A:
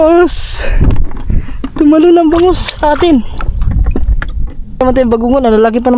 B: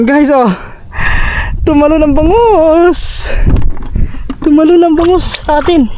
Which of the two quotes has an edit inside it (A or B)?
A